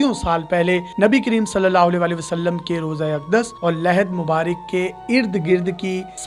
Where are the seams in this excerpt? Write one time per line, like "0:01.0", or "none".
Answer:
none